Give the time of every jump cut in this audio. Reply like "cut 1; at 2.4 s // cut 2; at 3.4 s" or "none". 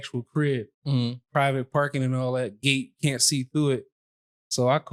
none